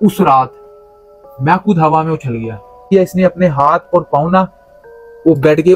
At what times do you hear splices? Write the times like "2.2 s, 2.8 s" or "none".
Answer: 2.9 s